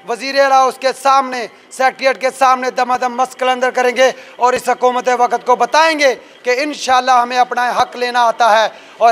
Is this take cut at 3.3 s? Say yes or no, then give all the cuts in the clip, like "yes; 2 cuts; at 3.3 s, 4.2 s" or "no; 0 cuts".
no; 0 cuts